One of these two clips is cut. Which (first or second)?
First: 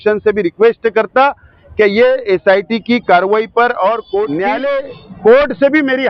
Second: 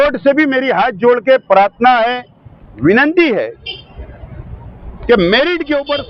first